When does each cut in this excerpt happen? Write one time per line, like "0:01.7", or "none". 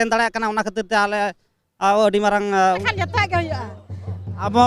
0:02.9